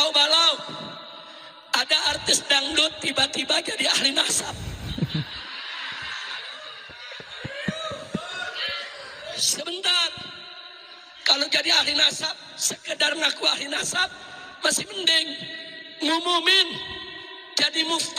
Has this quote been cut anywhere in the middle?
no; 0 cuts

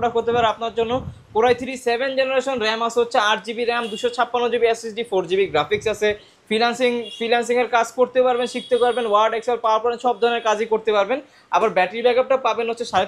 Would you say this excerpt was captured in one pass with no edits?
yes; 0 cuts

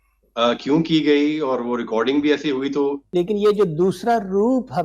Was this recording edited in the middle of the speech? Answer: yes; 1 cut; at 3.0 s

